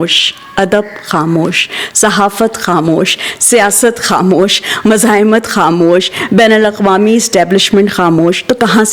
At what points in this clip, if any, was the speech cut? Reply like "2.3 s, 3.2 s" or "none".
none